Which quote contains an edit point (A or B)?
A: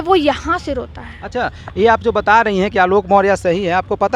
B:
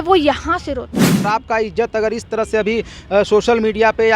B